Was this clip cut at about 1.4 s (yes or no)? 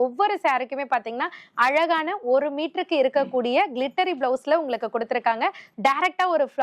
no